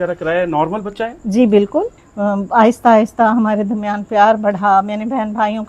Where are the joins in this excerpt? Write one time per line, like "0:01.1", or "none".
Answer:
0:02.0